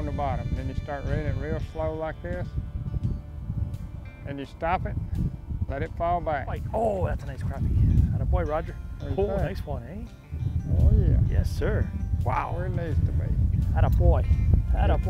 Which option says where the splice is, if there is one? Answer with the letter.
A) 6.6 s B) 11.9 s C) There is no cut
A